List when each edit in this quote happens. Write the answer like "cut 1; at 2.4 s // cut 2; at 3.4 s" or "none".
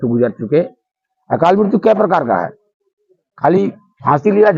none